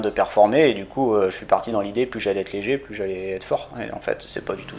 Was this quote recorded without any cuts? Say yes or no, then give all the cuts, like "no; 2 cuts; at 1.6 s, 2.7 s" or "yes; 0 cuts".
yes; 0 cuts